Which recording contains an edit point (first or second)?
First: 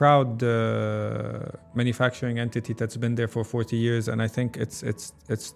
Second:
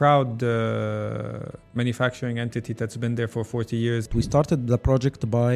second